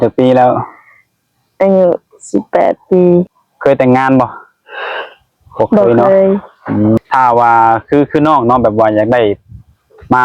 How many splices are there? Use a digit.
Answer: 2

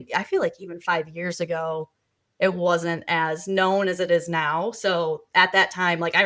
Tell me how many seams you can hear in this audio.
0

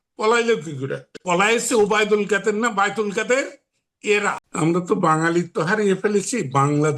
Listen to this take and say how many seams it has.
2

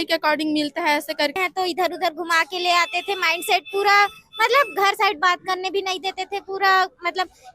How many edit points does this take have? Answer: 1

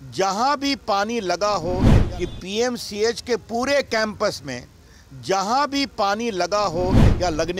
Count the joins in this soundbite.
1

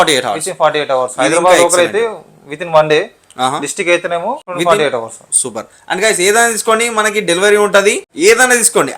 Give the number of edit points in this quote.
2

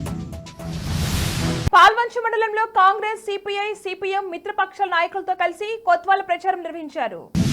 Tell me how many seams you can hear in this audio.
1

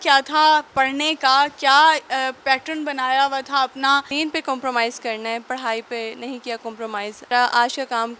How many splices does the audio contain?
2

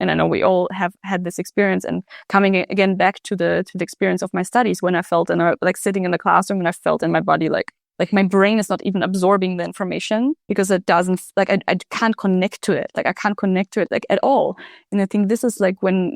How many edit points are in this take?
2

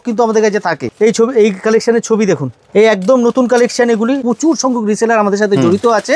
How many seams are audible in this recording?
3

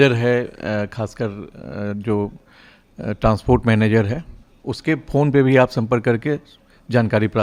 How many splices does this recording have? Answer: 0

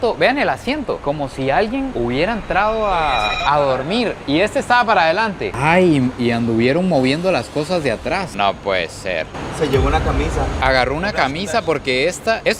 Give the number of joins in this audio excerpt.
3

